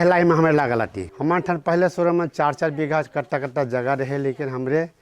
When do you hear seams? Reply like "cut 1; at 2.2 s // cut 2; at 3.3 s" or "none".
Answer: cut 1; at 1.0 s